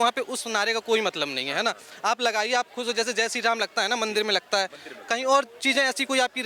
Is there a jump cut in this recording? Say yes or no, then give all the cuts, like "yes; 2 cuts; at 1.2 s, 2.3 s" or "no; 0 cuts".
no; 0 cuts